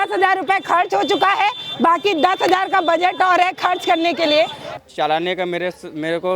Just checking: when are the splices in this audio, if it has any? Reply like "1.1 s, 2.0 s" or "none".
4.7 s